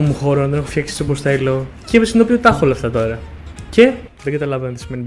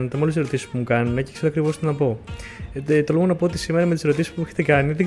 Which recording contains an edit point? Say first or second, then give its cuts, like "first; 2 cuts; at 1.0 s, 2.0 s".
first; 2 cuts; at 1.7 s, 4.1 s